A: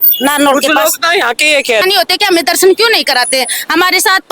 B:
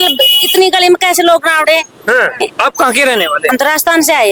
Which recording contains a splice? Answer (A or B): A